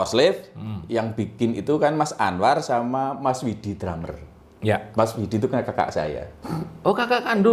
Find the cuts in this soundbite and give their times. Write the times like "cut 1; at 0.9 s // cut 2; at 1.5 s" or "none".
none